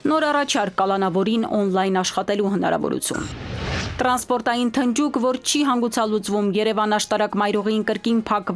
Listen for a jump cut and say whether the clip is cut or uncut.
cut